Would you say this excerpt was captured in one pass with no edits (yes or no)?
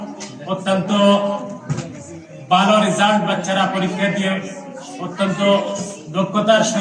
yes